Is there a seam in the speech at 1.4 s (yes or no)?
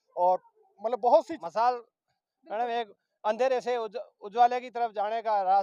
yes